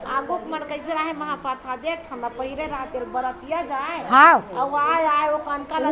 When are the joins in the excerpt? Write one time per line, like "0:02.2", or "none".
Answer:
none